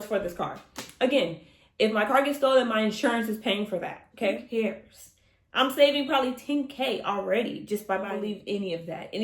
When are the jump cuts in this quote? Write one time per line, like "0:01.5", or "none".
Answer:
0:04.4
0:08.2